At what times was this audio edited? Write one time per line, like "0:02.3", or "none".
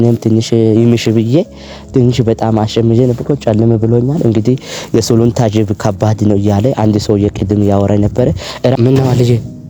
0:08.8